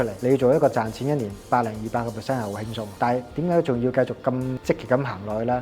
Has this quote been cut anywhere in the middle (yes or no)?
yes